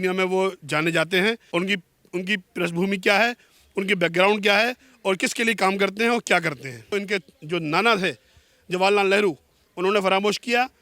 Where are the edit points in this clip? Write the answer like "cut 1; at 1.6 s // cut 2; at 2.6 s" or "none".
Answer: cut 1; at 1.4 s // cut 2; at 6.9 s